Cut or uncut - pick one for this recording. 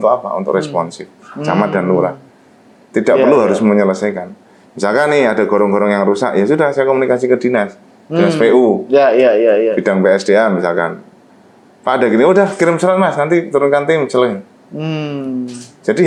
uncut